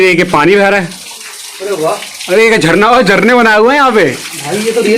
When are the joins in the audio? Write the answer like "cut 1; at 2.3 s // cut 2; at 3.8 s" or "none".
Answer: none